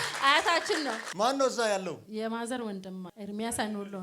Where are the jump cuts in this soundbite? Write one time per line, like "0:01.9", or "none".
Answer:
0:01.1
0:03.1